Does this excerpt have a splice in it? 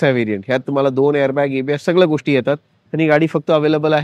no; 0 cuts

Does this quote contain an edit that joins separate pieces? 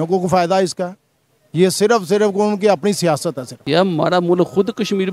yes; 1 cut; at 3.5 s

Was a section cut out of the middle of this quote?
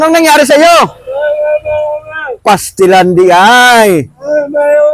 no; 0 cuts

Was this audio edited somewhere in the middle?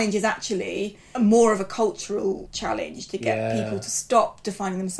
yes; 2 cuts; at 1.0 s, 2.5 s

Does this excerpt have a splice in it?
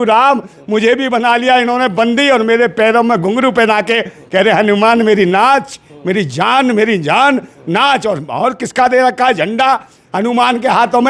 no; 0 cuts

